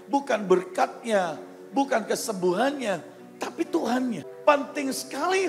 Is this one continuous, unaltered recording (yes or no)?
no